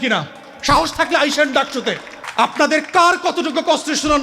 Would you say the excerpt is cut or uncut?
cut